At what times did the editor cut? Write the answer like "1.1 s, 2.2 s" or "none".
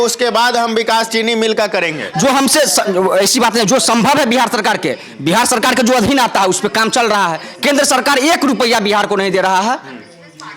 none

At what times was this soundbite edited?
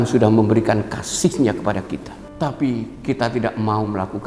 2.2 s

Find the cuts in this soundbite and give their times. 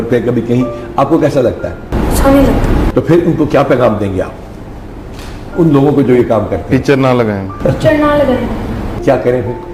none

